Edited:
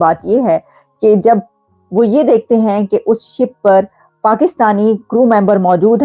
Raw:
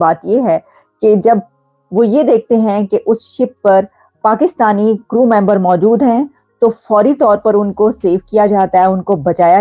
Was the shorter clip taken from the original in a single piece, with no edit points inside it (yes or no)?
yes